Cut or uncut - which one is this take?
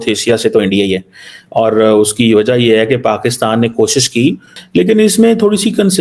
cut